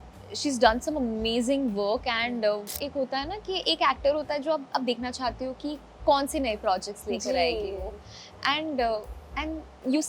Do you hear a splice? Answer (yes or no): yes